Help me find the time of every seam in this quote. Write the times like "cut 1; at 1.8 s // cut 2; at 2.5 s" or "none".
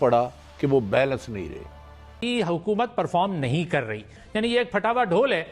cut 1; at 2.1 s // cut 2; at 4.2 s